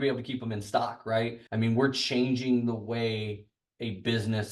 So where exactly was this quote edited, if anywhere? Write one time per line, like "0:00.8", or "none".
0:01.4